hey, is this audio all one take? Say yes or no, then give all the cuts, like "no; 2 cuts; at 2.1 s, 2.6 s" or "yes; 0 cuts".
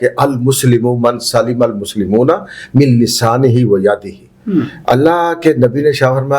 yes; 0 cuts